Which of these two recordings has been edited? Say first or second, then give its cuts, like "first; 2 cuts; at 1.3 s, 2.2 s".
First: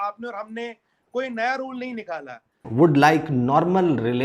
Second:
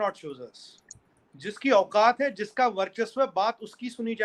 first; 1 cut; at 2.6 s